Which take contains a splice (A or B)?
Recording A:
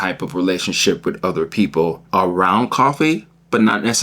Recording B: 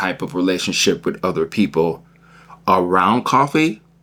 A